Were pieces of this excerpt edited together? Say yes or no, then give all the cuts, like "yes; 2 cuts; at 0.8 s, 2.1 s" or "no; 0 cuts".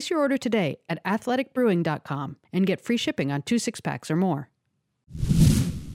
yes; 1 cut; at 5.0 s